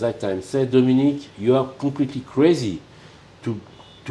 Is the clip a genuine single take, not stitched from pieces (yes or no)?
yes